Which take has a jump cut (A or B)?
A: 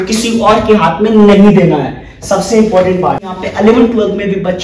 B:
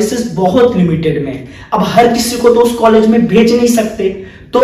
A